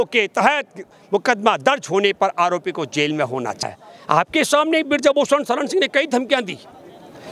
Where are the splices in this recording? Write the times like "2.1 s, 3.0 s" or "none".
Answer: 3.6 s